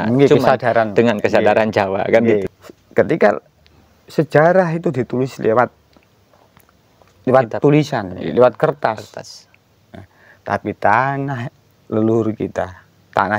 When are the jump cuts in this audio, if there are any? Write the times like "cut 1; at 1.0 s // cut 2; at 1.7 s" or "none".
cut 1; at 2.6 s